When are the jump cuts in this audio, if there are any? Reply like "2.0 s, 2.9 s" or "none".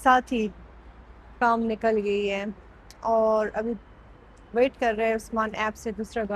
none